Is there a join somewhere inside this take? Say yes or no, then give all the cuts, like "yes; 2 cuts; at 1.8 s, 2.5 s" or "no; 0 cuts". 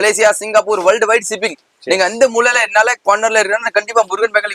no; 0 cuts